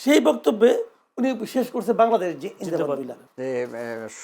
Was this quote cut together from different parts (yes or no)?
yes